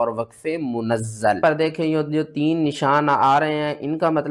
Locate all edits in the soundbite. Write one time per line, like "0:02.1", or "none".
0:01.4